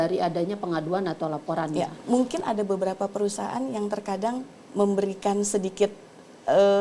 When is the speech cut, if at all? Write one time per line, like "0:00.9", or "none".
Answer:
0:02.0